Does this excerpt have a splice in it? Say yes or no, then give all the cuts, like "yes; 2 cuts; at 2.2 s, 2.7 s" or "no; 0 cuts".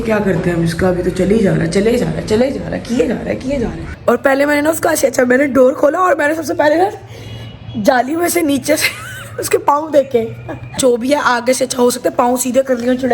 yes; 2 cuts; at 3.8 s, 10.8 s